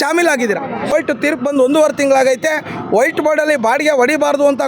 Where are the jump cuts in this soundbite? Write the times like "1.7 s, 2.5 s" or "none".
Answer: 0.9 s